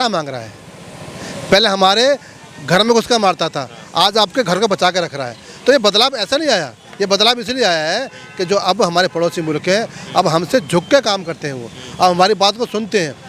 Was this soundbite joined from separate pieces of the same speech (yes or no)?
no